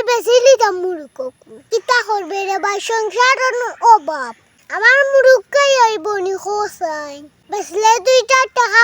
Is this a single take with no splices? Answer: no; 1 cut; at 1.6 s

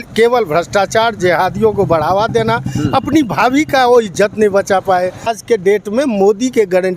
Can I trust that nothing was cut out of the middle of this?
no; 1 cut; at 5.3 s

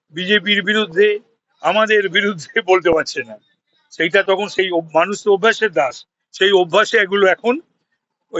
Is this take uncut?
yes; 0 cuts

